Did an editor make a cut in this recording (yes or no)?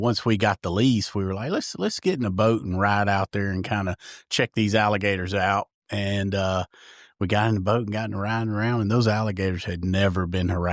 no